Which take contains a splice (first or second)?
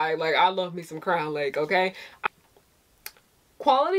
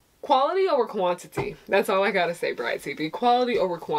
first